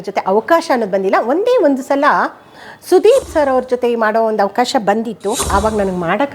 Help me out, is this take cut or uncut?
cut